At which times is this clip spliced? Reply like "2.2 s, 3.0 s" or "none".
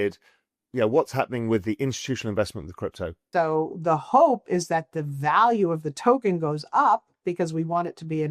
3.2 s